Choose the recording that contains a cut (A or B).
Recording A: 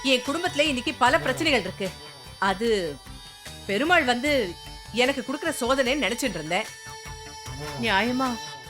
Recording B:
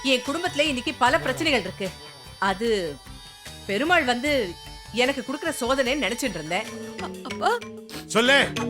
B